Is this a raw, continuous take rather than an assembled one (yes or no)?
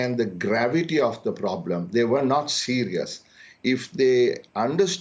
yes